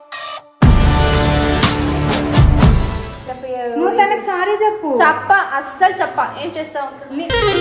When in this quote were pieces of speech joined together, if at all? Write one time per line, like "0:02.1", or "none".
0:03.1